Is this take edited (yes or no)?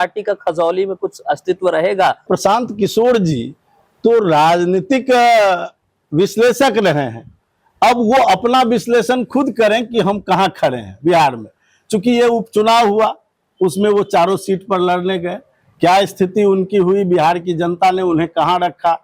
yes